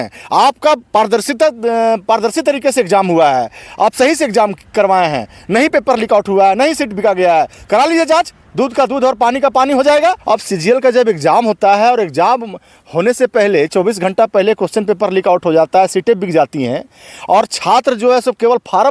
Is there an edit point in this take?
yes; 1 cut; at 10.2 s

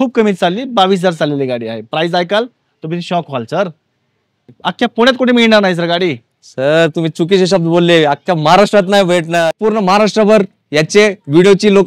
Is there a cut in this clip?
yes; 2 cuts; at 4.6 s, 9.5 s

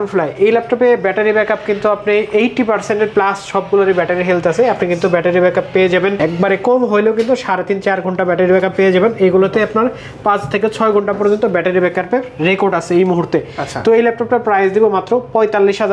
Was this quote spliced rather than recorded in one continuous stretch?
no; 0 cuts

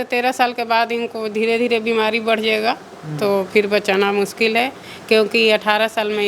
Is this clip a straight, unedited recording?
yes; 0 cuts

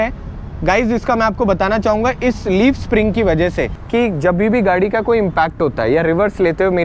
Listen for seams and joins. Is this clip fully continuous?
no; 1 cut; at 3.7 s

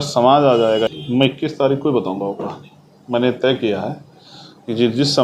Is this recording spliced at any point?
yes; 1 cut; at 0.9 s

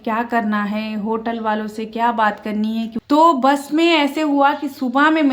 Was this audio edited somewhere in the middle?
yes; 1 cut; at 3.0 s

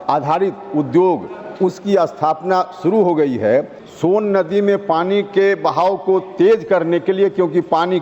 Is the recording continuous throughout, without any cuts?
no; 1 cut; at 3.8 s

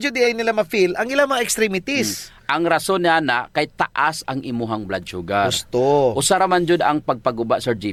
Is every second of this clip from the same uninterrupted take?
yes; 0 cuts

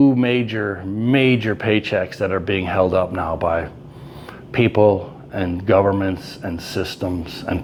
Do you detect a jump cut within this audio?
no; 0 cuts

